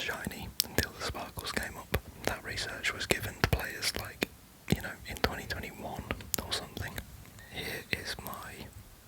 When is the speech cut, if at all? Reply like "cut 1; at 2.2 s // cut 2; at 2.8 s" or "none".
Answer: cut 1; at 2.2 s // cut 2; at 7.4 s